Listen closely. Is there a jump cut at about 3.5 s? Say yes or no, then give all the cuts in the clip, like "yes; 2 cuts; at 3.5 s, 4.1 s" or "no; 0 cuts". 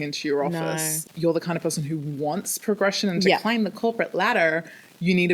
no; 1 cut; at 1.0 s